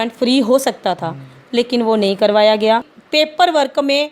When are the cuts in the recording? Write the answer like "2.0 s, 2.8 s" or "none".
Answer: 3.0 s